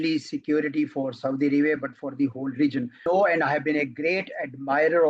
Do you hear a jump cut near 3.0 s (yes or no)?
yes